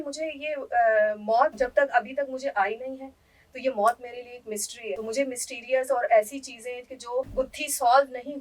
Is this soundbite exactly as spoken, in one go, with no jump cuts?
yes; 0 cuts

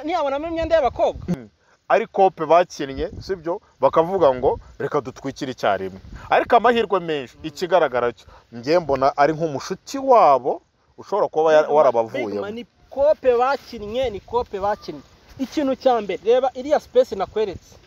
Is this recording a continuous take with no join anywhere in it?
no; 1 cut; at 1.2 s

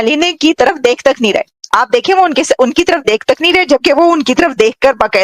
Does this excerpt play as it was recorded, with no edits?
yes; 0 cuts

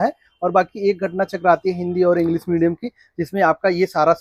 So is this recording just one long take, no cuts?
yes; 0 cuts

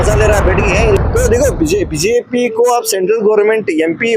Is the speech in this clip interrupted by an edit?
yes; 1 cut; at 1.0 s

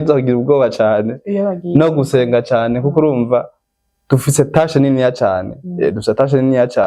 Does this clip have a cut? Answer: no; 0 cuts

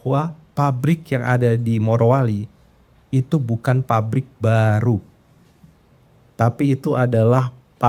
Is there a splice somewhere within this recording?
no; 0 cuts

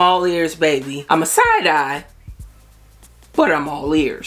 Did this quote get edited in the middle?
yes; 1 cut; at 0.9 s

